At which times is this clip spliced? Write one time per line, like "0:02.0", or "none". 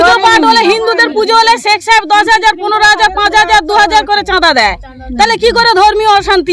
none